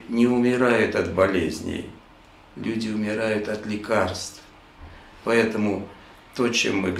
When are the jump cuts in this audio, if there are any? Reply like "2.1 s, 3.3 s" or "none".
none